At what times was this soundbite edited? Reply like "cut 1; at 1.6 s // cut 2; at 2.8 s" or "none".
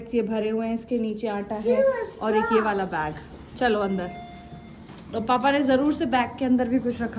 none